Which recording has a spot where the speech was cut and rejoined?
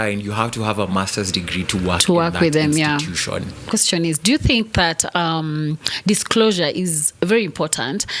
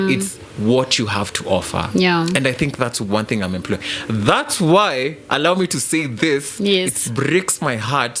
first; 1 cut; at 3.7 s

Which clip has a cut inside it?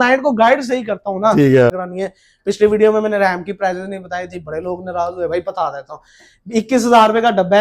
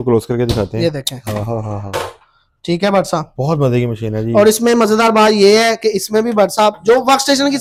first; 1 cut; at 1.8 s

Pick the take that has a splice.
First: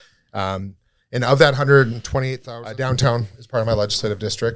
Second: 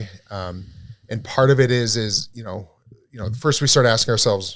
first; 1 cut; at 2.3 s

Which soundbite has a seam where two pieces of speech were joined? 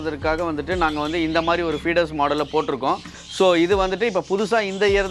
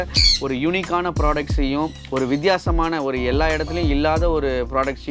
first; 1 cut; at 3.0 s

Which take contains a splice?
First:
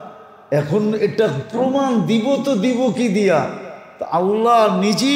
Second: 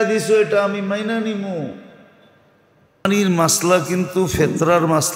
second; 1 cut; at 3.0 s

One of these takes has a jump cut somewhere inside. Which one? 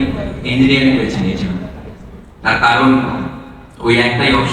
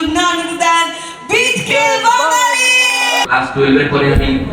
second; 1 cut; at 3.3 s

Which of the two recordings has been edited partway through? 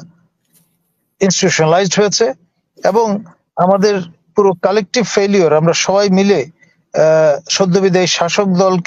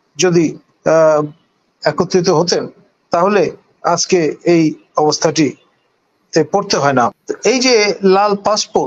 second; 1 cut; at 7.3 s

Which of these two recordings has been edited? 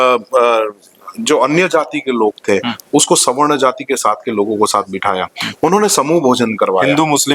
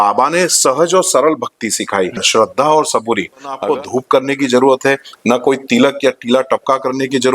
second; 2 cuts; at 2.2 s, 3.6 s

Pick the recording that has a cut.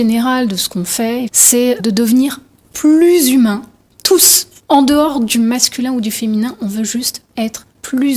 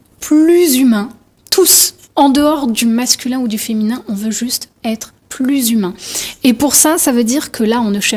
first; 1 cut; at 1.4 s

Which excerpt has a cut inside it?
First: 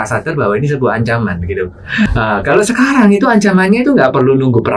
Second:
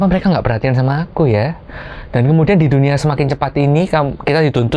first; 1 cut; at 2.1 s

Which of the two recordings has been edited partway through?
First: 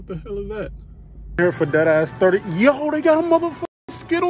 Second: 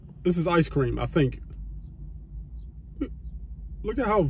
first; 1 cut; at 1.4 s

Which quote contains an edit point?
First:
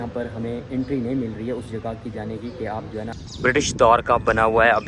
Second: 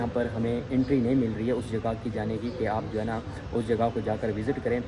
first; 1 cut; at 3.2 s

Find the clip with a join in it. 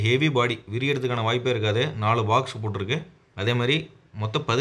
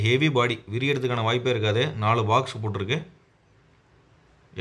first; 1 cut; at 3.2 s

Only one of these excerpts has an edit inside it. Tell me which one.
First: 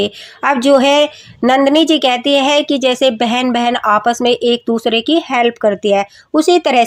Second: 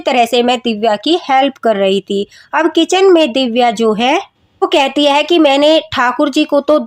second; 1 cut; at 4.6 s

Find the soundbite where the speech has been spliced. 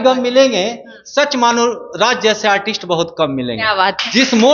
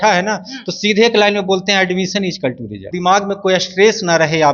second; 1 cut; at 2.8 s

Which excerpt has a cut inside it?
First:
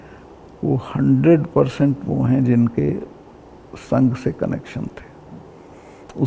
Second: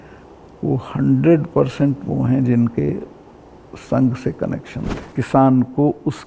second; 1 cut; at 5.2 s

